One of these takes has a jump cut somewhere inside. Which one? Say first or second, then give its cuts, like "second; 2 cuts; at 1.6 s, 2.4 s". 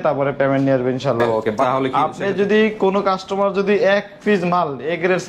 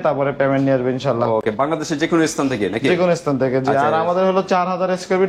first; 1 cut; at 1.6 s